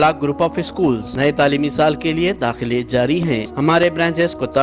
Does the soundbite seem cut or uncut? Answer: cut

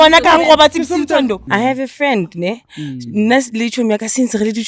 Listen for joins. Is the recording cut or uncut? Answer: cut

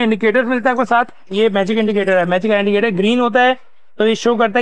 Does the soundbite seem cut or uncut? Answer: uncut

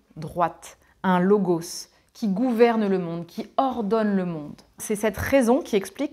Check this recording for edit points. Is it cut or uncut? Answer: cut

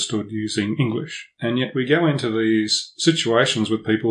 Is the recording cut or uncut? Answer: cut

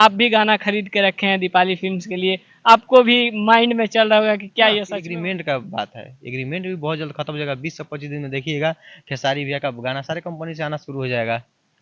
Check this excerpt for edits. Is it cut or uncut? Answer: cut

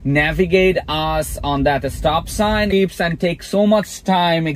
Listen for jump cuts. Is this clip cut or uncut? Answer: cut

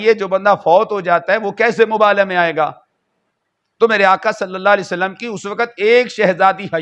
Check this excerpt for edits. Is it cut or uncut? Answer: uncut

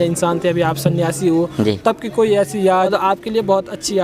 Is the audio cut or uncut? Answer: cut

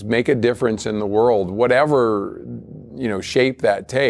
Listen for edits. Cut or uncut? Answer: uncut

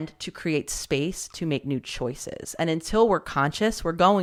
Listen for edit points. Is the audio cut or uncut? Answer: uncut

